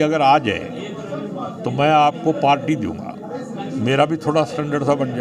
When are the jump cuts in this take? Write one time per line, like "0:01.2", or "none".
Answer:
none

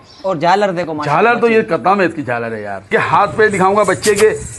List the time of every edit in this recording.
0:02.8

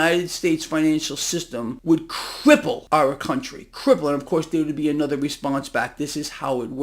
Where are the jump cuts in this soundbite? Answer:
0:01.7
0:02.8

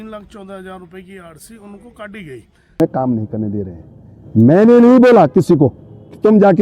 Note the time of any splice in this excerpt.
0:02.8

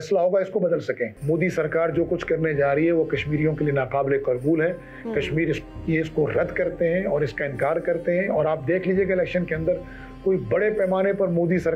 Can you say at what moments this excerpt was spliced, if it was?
0:01.1

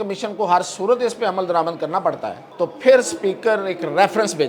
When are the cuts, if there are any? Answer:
0:02.4

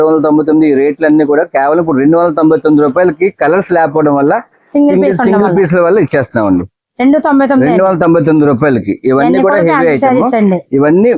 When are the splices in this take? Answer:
none

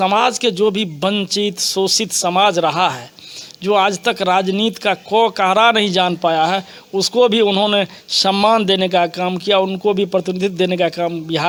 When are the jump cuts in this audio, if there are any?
none

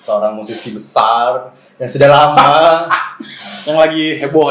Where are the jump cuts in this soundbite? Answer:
none

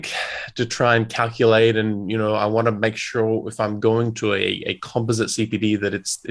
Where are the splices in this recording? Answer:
none

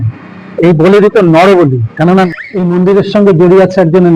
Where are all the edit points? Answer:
0:02.3

